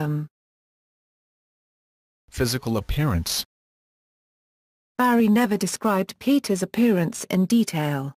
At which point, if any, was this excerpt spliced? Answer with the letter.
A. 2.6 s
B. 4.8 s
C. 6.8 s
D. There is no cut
A